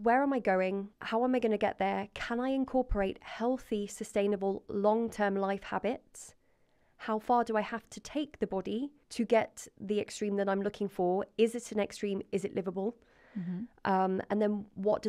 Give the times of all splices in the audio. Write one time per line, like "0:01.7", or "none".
0:01.0
0:09.0